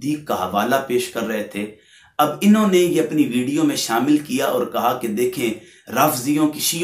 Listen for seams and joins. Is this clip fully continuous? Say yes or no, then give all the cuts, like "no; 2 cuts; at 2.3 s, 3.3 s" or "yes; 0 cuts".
yes; 0 cuts